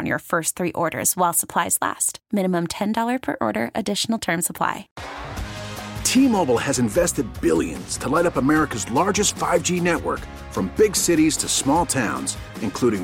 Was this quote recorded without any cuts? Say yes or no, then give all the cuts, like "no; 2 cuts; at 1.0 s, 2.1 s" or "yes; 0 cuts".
no; 1 cut; at 4.9 s